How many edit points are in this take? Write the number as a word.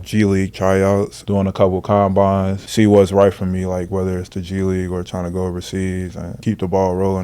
three